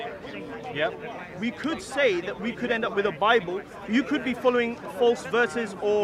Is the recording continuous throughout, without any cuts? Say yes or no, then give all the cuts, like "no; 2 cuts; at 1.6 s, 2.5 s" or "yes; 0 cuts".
yes; 0 cuts